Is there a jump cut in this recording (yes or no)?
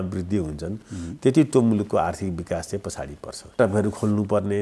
yes